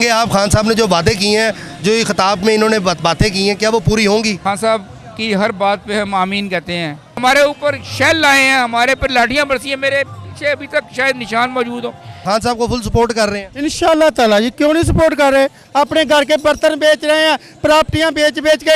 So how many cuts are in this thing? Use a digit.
4